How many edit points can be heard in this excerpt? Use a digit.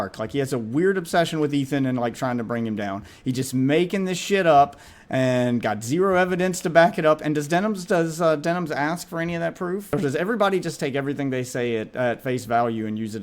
1